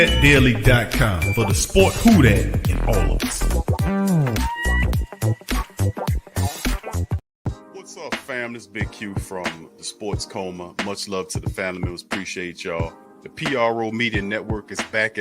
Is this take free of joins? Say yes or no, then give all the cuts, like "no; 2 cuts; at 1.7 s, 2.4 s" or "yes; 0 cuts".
no; 1 cut; at 7.2 s